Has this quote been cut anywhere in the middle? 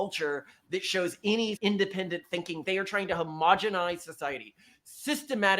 yes; 2 cuts; at 1.6 s, 2.6 s

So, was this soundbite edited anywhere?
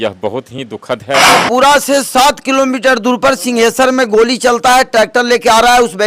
yes; 1 cut; at 1.4 s

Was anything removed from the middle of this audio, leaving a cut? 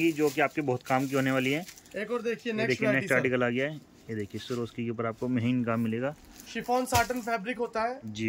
no; 0 cuts

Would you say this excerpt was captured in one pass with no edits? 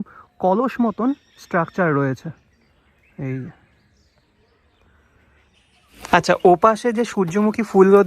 yes; 0 cuts

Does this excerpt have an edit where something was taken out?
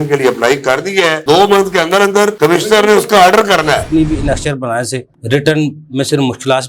yes; 2 cuts; at 1.2 s, 3.9 s

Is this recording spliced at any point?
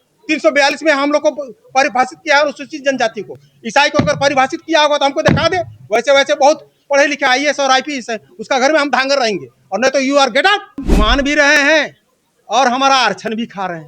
yes; 1 cut; at 10.9 s

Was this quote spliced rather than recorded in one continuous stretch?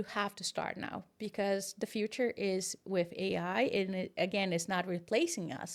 no; 0 cuts

